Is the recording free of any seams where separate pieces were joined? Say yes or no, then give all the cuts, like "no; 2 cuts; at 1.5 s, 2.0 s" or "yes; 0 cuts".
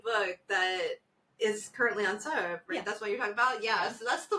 yes; 0 cuts